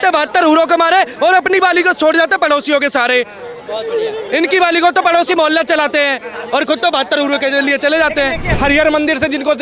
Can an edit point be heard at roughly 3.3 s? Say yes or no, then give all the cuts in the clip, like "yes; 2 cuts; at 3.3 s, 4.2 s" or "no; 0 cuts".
no; 1 cut; at 8.5 s